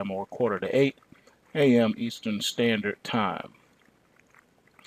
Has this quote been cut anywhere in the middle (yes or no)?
yes